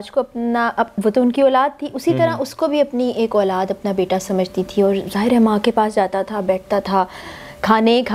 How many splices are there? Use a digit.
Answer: 0